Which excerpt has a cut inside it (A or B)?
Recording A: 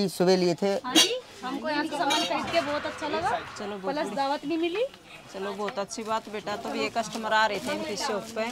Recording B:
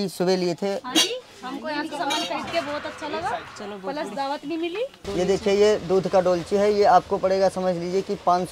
B